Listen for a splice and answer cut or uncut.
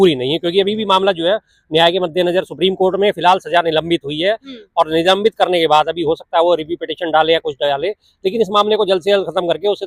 uncut